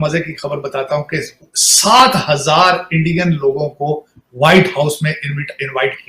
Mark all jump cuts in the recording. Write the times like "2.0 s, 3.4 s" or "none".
none

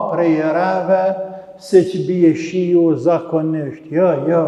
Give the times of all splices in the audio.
none

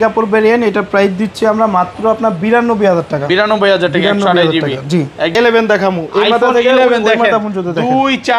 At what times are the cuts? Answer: 5.3 s

